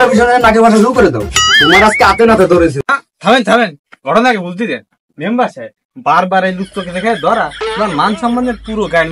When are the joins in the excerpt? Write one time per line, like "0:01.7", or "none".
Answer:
0:02.8